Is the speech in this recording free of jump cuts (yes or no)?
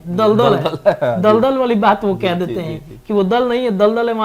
yes